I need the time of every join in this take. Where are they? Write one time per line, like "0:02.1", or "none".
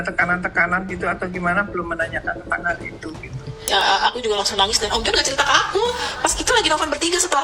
0:03.7